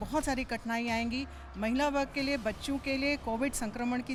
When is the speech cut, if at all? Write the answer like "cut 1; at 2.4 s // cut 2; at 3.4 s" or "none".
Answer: none